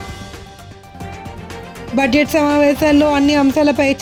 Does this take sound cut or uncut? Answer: uncut